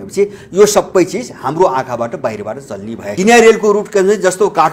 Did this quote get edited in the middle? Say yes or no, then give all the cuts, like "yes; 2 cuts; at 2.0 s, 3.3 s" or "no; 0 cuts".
yes; 1 cut; at 3.1 s